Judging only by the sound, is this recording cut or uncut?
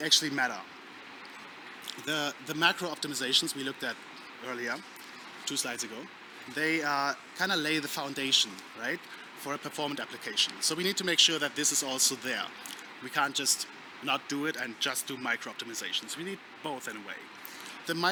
uncut